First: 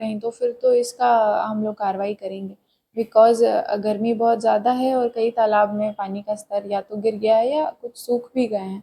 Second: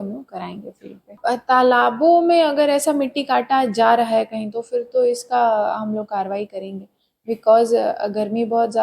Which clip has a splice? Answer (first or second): second